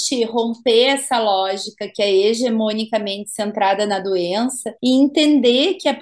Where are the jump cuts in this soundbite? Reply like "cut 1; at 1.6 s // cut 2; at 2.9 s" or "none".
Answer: cut 1; at 4.7 s